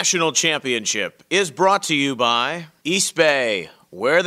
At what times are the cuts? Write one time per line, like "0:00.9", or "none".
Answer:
0:02.6